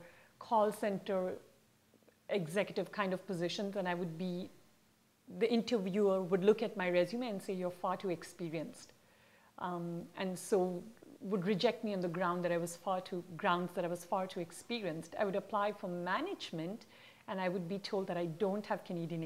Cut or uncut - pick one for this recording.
uncut